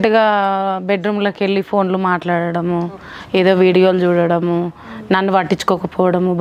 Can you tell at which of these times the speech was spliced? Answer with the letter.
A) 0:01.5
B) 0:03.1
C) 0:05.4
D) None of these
D